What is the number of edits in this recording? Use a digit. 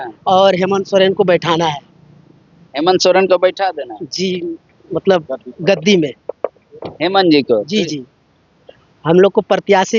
0